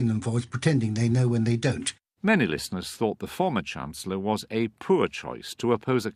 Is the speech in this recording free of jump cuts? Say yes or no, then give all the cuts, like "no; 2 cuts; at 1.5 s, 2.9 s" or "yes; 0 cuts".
yes; 0 cuts